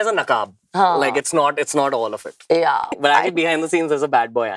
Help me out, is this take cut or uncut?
cut